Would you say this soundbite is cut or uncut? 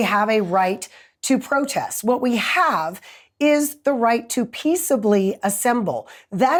uncut